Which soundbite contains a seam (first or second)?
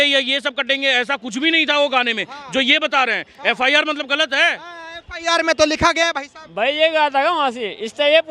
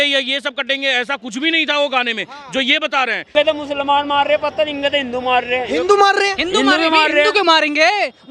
second